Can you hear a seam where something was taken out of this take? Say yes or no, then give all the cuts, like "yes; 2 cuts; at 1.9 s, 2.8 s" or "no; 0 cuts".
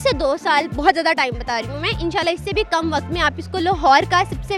no; 0 cuts